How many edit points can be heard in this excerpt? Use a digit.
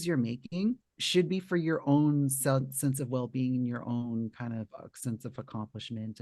1